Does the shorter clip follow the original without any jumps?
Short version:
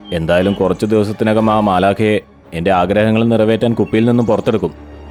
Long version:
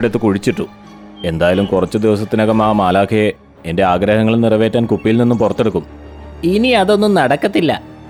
yes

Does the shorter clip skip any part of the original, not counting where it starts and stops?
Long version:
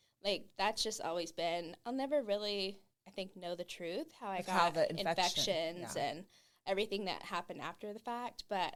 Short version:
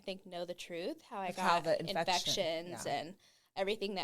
no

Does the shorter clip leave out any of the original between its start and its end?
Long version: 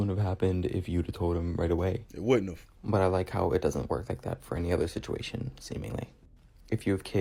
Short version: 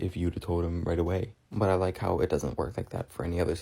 yes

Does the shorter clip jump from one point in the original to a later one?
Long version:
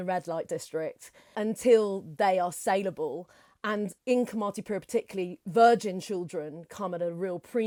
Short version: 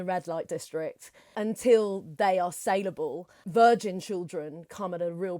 yes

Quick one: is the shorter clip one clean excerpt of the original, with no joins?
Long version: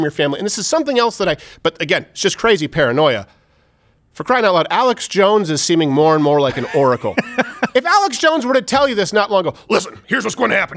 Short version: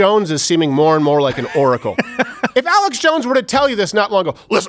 yes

